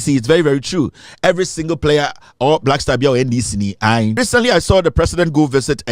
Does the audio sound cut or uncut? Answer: cut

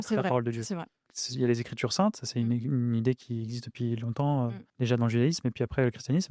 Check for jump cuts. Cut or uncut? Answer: cut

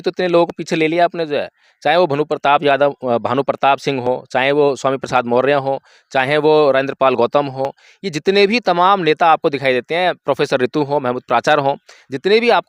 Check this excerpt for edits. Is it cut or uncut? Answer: uncut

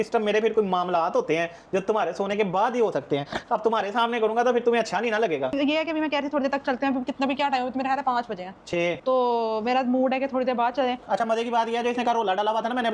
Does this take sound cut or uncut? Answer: uncut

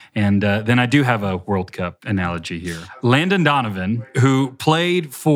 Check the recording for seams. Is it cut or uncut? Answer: cut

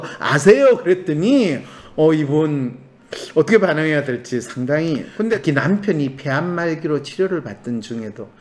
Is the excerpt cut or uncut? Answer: cut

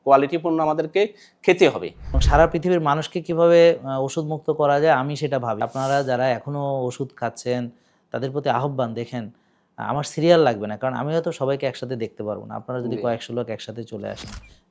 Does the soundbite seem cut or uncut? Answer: cut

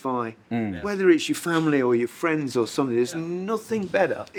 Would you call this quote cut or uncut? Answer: uncut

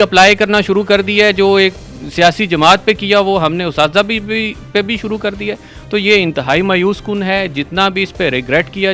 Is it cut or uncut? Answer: uncut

